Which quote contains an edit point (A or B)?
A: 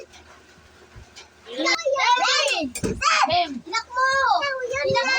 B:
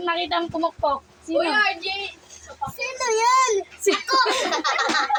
A